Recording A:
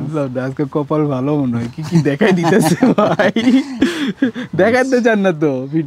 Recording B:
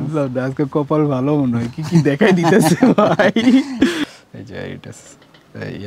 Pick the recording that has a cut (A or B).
B